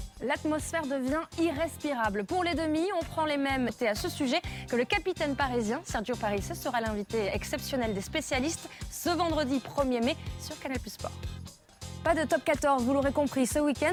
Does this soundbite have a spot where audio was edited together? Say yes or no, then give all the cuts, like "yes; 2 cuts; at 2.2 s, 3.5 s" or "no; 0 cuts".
no; 0 cuts